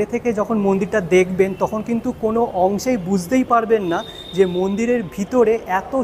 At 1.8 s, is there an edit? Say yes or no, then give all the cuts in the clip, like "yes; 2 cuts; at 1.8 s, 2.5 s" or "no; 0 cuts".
no; 0 cuts